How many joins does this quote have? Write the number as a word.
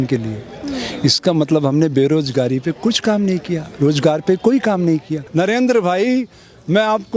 one